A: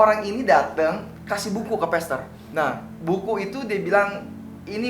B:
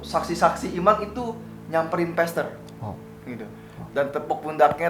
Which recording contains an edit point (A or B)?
A